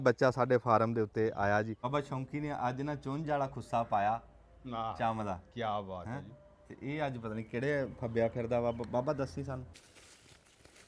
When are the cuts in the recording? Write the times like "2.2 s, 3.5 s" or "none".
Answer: 1.8 s, 9.8 s